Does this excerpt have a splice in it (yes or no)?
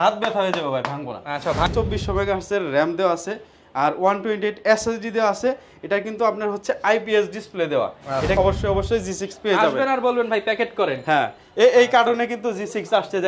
yes